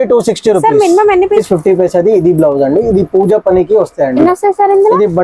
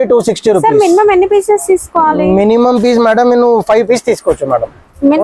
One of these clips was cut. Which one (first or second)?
first